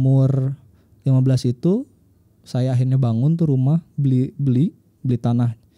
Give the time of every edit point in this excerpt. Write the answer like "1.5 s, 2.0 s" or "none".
none

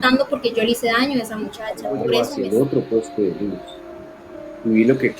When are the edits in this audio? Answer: 2.3 s

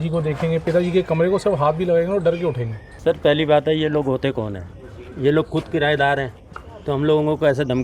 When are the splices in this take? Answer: 2.9 s

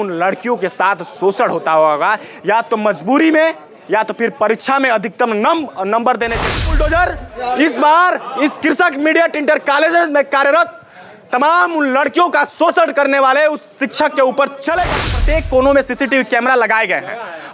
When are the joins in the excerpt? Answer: 6.7 s, 15.2 s

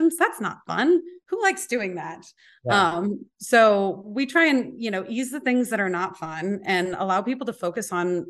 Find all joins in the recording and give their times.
1.2 s

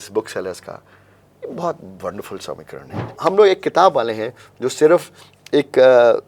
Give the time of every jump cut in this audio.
3.2 s

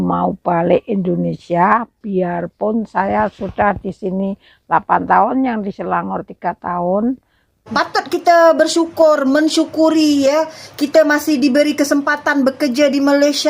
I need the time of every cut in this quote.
7.6 s

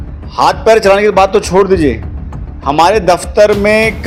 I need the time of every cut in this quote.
none

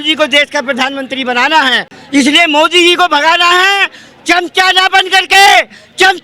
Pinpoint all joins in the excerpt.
none

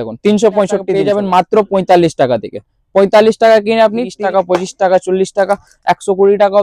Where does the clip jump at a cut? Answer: 0.9 s, 4.1 s

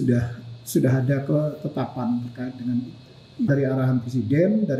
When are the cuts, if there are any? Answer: 3.5 s

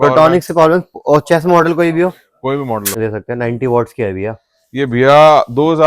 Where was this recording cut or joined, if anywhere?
3.0 s

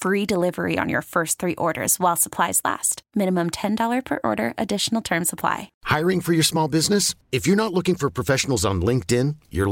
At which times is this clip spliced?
5.7 s

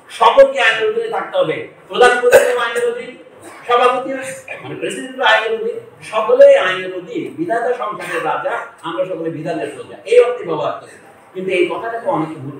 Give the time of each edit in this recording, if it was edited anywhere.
none

